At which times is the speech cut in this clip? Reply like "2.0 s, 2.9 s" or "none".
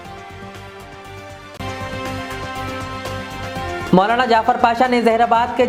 none